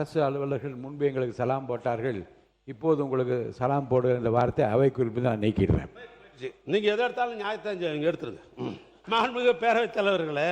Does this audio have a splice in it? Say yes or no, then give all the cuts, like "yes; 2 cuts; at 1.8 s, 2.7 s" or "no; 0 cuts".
yes; 1 cut; at 8.9 s